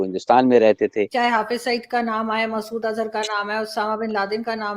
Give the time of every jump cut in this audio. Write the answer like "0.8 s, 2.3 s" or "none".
1.1 s